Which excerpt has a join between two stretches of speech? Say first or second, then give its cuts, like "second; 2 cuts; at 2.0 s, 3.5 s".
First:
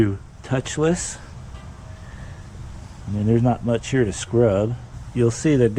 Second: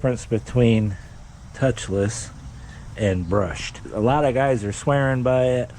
second; 1 cut; at 3.8 s